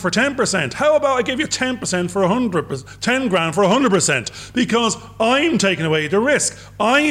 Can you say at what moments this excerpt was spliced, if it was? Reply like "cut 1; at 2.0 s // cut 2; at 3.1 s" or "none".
none